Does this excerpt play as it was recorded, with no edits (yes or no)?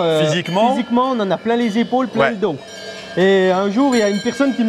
yes